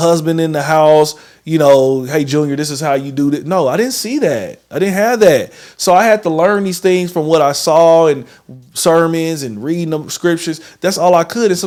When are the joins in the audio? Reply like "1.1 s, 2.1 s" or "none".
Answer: none